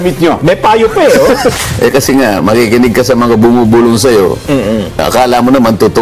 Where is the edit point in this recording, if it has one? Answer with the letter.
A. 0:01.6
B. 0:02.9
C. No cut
A